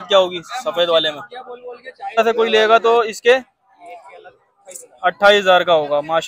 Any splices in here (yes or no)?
yes